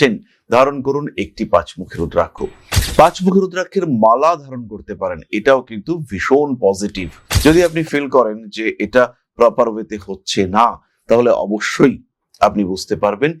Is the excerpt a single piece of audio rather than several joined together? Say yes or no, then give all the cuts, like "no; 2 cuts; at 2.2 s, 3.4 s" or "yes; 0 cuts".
no; 1 cut; at 7.2 s